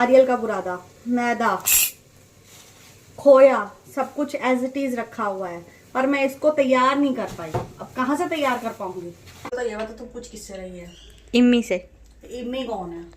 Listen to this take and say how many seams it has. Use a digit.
1